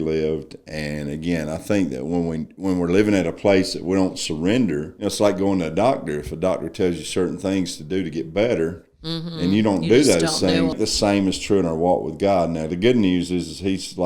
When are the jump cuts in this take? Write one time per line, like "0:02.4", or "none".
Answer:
0:04.9
0:10.7